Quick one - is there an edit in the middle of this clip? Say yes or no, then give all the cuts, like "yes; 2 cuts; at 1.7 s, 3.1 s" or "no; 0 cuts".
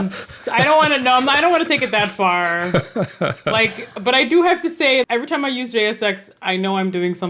yes; 1 cut; at 5.1 s